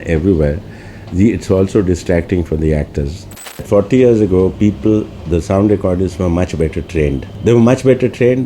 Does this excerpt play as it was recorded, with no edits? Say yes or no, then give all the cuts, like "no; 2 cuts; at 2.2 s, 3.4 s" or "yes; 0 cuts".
no; 2 cuts; at 3.6 s, 7.3 s